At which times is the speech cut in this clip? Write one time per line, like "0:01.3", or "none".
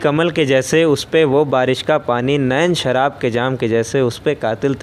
none